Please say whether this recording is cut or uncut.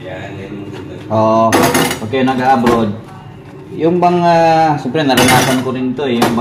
uncut